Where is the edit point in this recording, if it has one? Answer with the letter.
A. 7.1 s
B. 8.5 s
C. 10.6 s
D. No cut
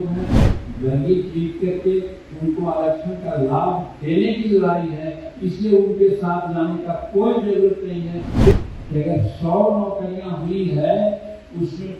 B